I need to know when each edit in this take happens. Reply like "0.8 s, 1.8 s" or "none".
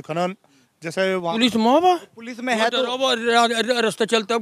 1.3 s